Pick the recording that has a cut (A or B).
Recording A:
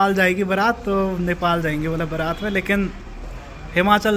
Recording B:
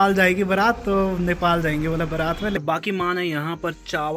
B